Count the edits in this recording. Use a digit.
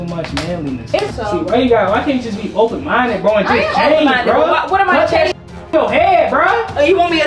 1